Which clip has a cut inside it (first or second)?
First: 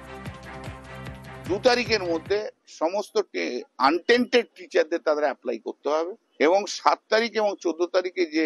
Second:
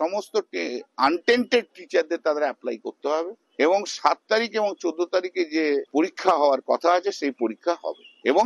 first